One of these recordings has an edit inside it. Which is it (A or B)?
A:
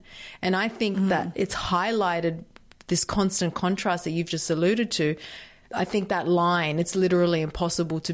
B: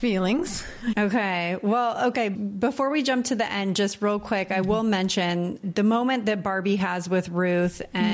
B